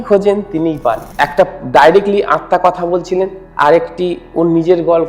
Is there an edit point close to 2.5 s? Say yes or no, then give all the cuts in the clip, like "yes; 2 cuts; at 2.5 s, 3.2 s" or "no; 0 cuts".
no; 1 cut; at 1.1 s